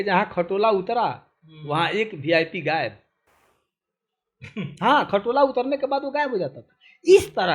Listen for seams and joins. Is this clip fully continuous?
yes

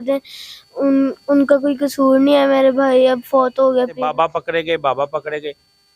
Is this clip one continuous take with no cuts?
no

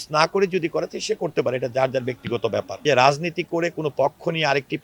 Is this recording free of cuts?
no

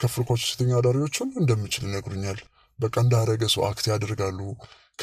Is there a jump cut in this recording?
no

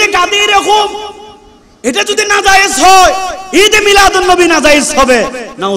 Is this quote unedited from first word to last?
yes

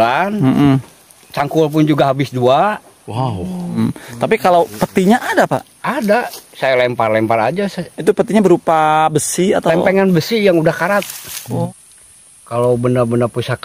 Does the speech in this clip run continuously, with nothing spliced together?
no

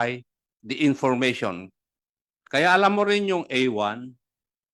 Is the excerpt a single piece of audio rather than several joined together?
yes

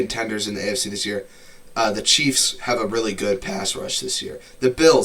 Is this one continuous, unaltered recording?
yes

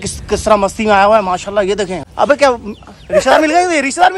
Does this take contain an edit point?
yes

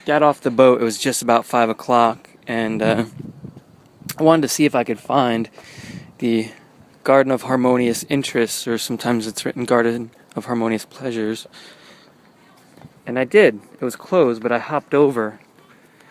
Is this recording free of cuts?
yes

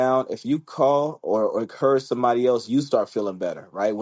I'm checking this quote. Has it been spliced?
no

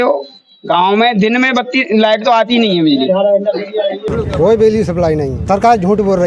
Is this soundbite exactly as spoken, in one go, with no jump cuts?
no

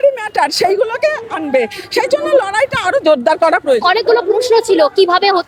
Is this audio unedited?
yes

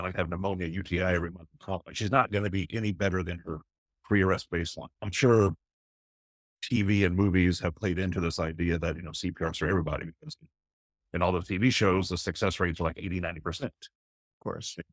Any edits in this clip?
yes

